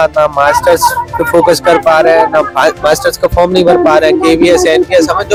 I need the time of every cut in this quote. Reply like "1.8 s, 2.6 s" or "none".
none